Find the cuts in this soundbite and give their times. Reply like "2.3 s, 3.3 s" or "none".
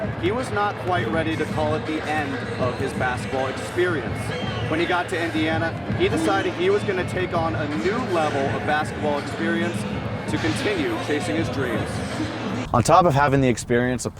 12.0 s